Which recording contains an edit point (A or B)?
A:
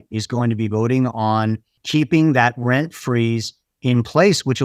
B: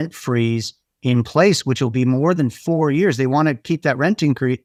A